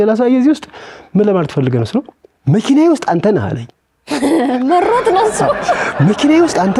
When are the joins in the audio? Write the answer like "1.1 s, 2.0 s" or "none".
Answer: none